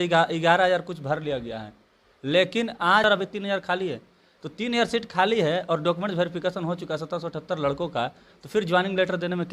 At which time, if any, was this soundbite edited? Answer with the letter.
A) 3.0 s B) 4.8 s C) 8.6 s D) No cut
A